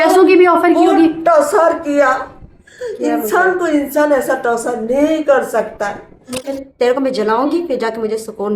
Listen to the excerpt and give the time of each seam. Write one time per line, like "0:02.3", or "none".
0:06.4